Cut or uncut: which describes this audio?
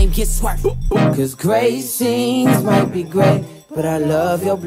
uncut